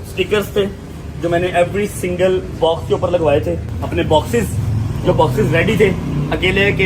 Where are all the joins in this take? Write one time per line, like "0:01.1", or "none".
0:03.7